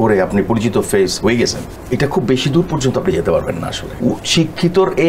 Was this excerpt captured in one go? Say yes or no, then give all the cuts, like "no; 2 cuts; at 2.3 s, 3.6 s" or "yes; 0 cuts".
no; 2 cuts; at 1.7 s, 3.8 s